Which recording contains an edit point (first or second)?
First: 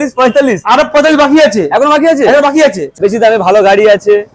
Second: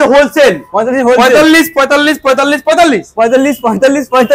first